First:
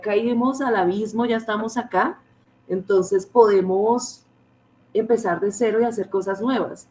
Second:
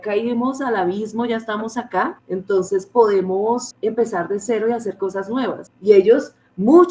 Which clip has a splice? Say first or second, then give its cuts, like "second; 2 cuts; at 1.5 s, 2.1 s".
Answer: second; 3 cuts; at 2.2 s, 3.7 s, 5.7 s